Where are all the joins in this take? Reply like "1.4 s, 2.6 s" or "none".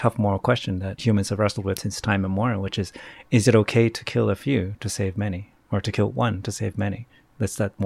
0.9 s, 1.8 s